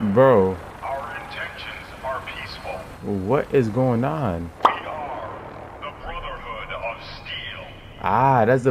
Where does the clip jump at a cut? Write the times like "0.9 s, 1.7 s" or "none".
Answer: 2.9 s, 4.6 s